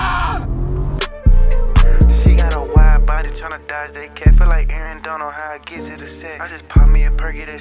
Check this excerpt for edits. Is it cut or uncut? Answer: cut